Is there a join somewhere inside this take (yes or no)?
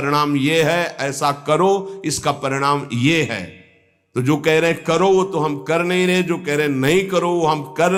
no